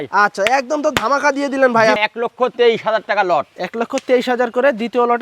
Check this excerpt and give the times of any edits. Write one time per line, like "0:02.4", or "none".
0:02.0